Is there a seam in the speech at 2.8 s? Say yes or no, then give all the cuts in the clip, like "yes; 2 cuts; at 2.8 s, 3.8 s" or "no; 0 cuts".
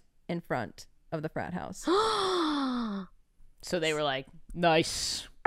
no; 0 cuts